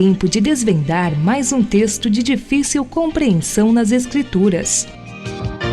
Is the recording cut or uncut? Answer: cut